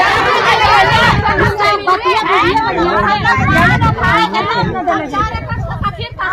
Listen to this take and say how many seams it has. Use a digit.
0